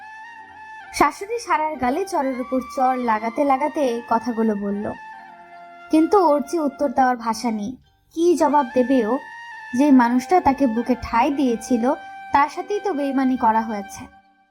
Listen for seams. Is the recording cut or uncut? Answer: cut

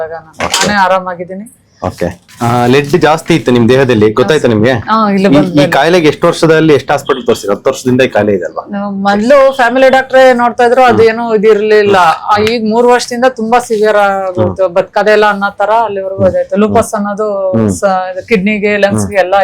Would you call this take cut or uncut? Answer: cut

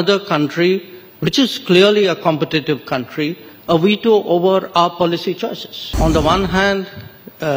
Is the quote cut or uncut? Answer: cut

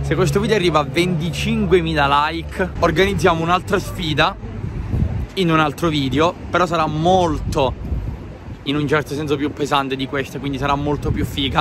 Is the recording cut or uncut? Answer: uncut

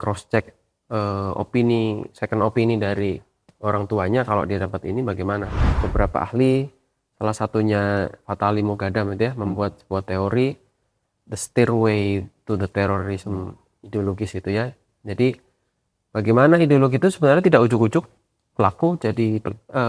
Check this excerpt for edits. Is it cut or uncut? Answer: cut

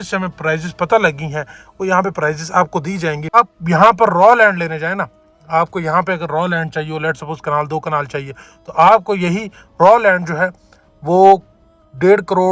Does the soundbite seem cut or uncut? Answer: cut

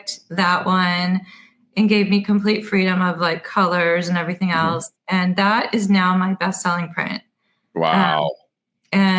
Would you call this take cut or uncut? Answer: uncut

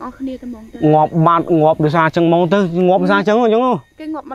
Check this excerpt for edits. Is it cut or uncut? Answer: uncut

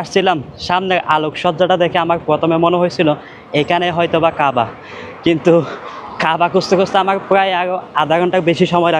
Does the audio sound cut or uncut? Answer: uncut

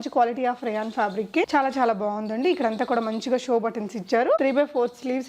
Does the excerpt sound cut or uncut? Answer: cut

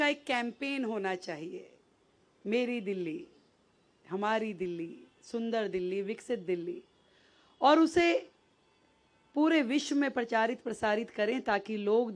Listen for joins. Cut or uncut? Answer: uncut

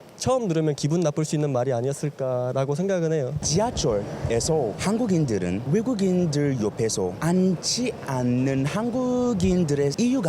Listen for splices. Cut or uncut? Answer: cut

